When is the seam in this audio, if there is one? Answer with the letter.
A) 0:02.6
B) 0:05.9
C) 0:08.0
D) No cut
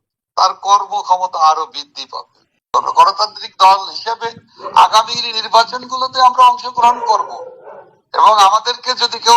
A